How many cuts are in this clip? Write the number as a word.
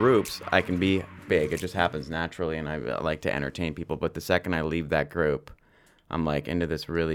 zero